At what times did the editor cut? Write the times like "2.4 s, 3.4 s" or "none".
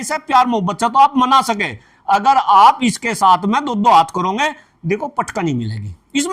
none